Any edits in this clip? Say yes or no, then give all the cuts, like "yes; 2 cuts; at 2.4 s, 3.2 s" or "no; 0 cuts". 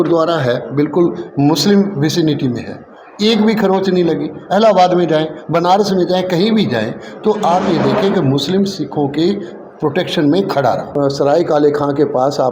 yes; 1 cut; at 10.9 s